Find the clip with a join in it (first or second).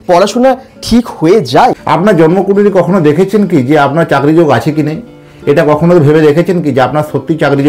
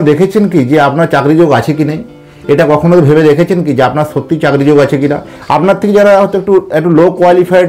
first